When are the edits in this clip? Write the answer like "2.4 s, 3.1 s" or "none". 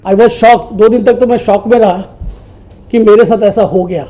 none